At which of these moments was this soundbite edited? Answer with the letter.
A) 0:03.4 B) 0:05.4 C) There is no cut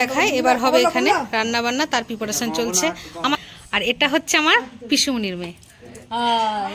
A